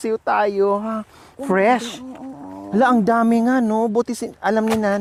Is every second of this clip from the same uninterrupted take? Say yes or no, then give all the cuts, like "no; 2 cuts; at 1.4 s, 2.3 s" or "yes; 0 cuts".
yes; 0 cuts